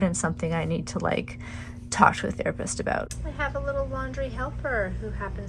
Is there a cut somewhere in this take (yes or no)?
yes